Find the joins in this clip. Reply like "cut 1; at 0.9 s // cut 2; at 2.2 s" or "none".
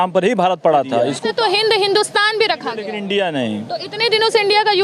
cut 1; at 1.1 s // cut 2; at 2.9 s